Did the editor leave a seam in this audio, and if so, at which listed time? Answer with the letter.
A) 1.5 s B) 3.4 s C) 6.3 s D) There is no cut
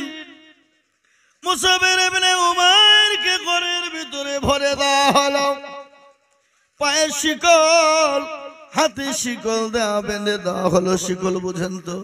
D